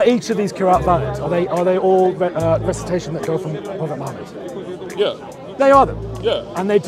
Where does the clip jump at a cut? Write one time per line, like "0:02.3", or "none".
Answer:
none